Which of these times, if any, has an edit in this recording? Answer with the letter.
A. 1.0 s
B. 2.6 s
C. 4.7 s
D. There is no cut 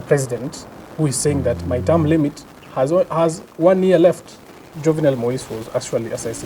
C